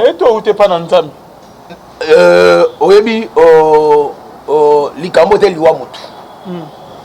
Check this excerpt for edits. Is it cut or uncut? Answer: uncut